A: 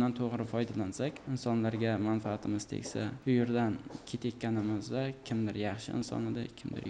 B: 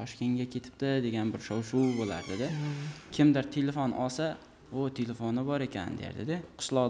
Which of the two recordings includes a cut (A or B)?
A